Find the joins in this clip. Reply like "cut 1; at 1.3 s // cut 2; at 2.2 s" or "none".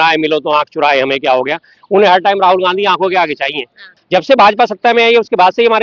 cut 1; at 3.8 s